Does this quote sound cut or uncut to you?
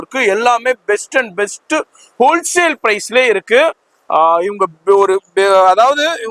uncut